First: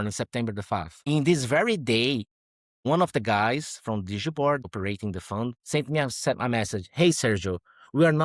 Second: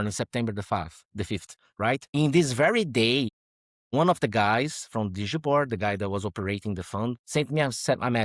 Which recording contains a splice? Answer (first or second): first